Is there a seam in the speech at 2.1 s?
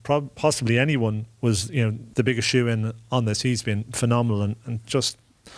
yes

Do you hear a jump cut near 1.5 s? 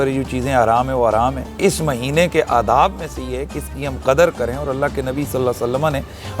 yes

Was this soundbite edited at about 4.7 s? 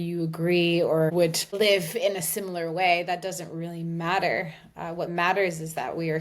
no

